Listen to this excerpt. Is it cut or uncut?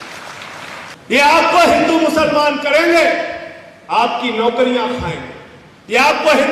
cut